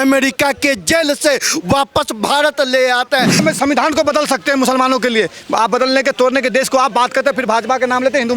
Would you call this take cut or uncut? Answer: cut